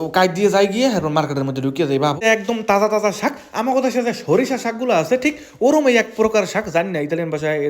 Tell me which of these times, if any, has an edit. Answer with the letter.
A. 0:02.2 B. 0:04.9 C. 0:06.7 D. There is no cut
A